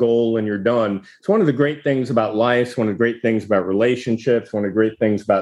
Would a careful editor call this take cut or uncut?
uncut